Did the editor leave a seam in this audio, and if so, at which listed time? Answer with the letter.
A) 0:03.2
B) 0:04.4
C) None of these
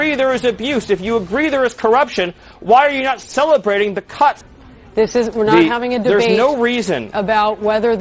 B